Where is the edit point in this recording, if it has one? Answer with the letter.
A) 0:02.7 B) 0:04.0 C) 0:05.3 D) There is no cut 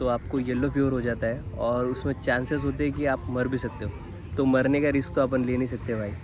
D